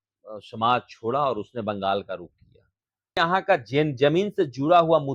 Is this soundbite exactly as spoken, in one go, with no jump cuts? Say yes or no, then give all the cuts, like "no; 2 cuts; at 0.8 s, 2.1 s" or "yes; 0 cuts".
no; 1 cut; at 3.2 s